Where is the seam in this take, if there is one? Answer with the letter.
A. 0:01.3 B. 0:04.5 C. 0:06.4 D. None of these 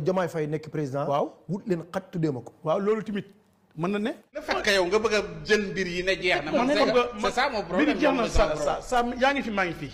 B